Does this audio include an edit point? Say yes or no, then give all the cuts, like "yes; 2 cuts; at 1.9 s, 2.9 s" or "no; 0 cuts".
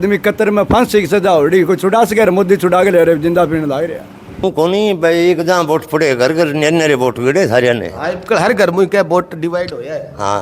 yes; 1 cut; at 4.4 s